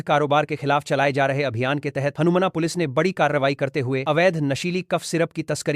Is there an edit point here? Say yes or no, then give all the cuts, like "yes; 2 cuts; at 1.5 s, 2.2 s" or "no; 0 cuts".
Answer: no; 0 cuts